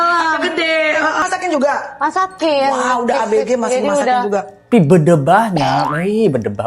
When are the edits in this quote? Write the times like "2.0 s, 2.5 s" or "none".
1.2 s, 4.7 s